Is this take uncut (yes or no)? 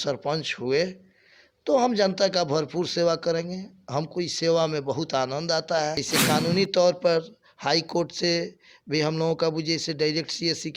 no